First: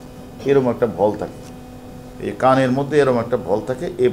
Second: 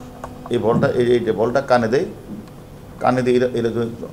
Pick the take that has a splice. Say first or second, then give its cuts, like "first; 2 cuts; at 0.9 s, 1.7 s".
first; 1 cut; at 2.1 s